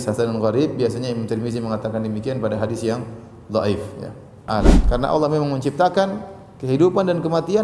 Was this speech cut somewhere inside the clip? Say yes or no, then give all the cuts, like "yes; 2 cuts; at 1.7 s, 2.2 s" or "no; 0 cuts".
yes; 1 cut; at 4.5 s